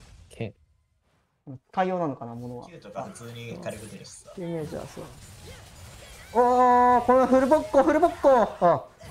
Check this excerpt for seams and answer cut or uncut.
cut